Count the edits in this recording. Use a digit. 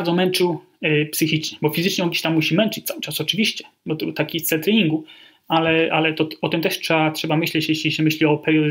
0